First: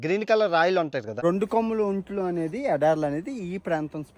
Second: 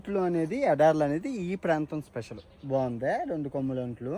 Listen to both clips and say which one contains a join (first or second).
first